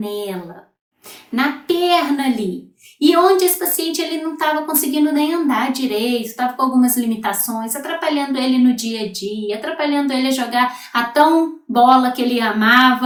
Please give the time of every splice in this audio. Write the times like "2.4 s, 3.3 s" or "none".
none